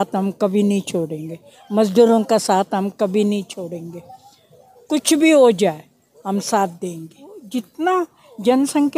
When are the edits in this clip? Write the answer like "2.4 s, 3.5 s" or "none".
7.4 s